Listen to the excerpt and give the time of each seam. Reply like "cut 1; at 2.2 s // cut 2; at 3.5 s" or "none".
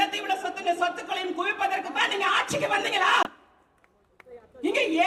none

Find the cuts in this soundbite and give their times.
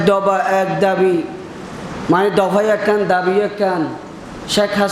none

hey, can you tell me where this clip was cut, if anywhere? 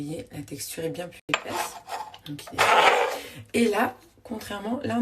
cut 1; at 1.2 s

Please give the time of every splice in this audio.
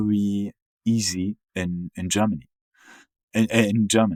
none

